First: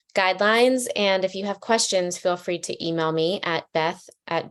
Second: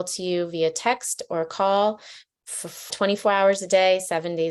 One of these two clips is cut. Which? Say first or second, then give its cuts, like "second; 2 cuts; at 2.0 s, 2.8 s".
second; 1 cut; at 2.9 s